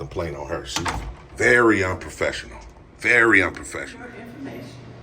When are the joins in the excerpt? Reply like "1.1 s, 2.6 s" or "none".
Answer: 4.1 s